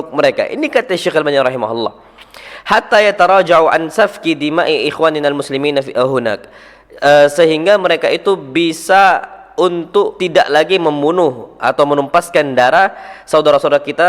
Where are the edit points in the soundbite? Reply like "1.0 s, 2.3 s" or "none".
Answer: 10.2 s